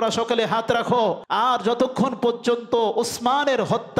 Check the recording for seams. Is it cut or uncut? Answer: cut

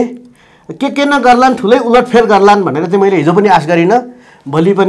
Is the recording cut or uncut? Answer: uncut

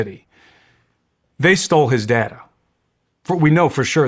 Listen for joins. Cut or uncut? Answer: uncut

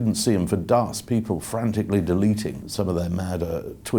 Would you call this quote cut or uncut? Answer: cut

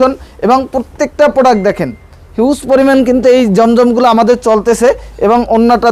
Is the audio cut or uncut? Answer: uncut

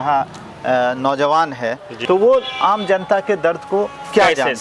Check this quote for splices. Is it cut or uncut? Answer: cut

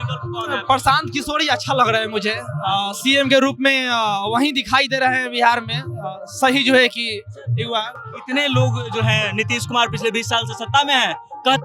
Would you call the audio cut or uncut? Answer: uncut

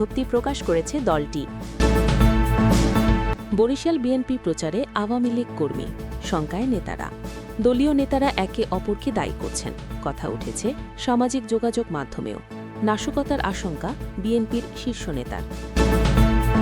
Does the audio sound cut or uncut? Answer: cut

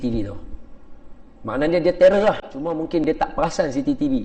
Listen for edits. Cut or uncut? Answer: cut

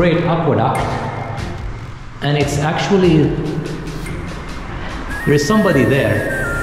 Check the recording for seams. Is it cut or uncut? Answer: uncut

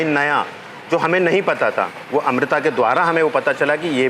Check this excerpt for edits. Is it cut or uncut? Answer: uncut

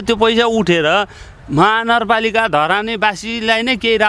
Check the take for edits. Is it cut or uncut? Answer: uncut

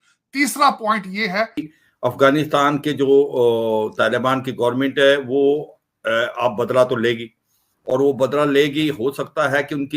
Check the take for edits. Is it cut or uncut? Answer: cut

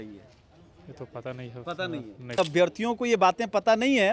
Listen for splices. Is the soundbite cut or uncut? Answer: cut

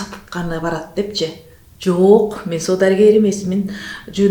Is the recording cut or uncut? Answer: uncut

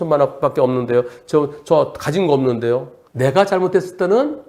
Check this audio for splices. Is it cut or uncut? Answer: cut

